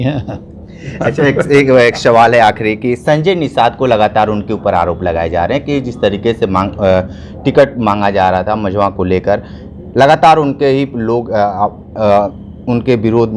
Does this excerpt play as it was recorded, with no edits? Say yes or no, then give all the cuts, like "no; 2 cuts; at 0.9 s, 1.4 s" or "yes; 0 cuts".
yes; 0 cuts